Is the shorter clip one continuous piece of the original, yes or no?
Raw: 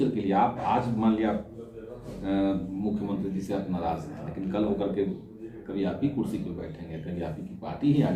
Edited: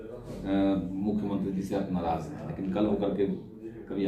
yes